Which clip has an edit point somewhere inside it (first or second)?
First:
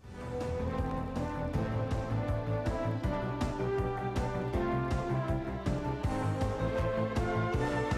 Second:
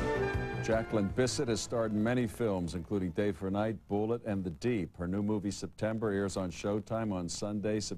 second